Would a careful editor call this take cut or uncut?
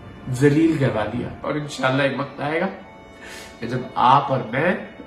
cut